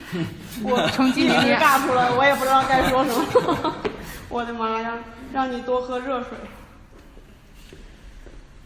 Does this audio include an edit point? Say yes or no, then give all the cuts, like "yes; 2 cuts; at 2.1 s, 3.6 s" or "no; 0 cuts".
yes; 1 cut; at 7.0 s